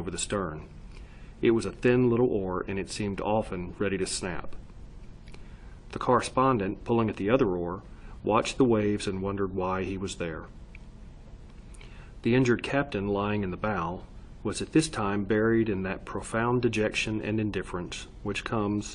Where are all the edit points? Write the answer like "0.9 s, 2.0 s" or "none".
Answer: 10.4 s